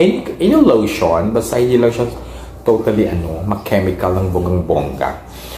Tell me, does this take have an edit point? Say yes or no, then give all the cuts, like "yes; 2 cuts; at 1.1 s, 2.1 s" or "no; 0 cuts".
no; 0 cuts